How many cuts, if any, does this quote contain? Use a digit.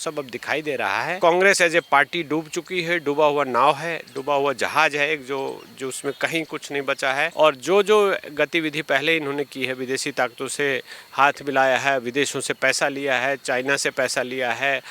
2